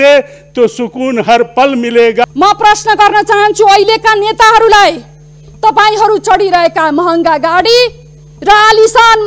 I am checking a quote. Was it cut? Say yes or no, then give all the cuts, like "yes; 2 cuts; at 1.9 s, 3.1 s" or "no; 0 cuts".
yes; 1 cut; at 2.2 s